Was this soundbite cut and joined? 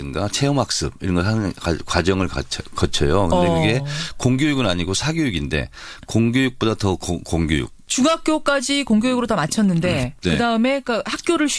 yes; 1 cut; at 5.6 s

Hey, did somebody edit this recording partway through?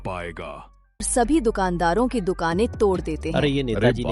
yes; 1 cut; at 1.1 s

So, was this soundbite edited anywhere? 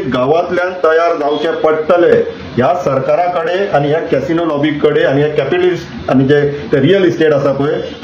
no; 0 cuts

